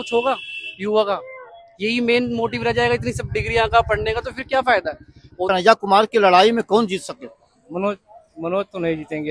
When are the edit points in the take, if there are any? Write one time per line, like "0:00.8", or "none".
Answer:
0:05.5